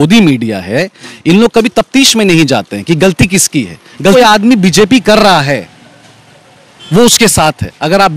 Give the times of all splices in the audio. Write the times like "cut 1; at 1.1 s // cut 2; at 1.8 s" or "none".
cut 1; at 4.1 s

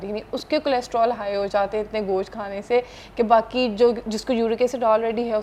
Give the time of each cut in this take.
none

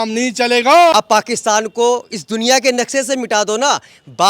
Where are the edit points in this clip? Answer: cut 1; at 1.0 s

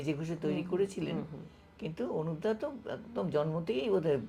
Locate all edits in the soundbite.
none

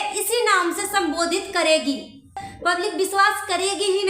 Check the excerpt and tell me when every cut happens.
cut 1; at 2.5 s

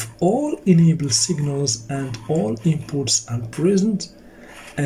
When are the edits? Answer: none

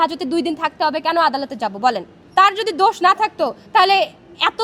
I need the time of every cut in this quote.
cut 1; at 2.1 s

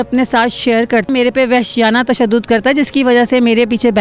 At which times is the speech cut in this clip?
cut 1; at 1.1 s

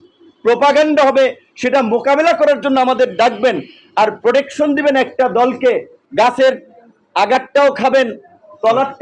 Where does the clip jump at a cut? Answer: cut 1; at 6.0 s

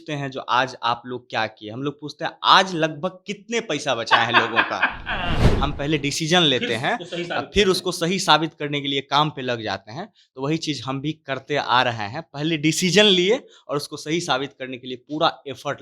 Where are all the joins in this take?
cut 1; at 5.5 s

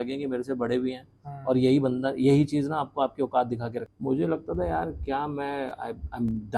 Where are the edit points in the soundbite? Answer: cut 1; at 3.9 s

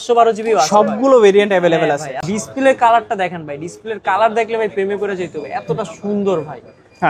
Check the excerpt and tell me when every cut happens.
cut 1; at 2.2 s

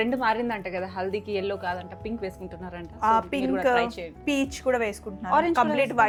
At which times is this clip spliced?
none

